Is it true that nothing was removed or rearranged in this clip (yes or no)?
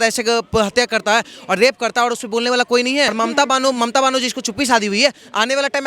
no